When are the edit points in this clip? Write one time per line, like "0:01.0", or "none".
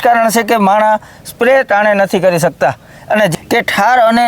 0:03.3